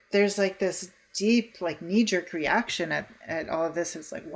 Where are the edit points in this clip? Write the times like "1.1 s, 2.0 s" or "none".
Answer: none